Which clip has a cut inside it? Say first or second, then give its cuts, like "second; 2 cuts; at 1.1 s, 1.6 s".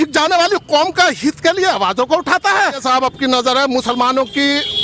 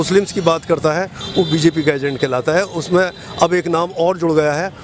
first; 1 cut; at 2.8 s